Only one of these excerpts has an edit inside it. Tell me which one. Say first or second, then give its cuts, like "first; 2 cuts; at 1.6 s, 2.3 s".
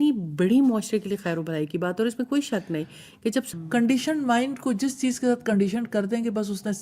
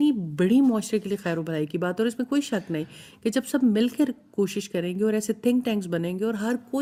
first; 1 cut; at 3.5 s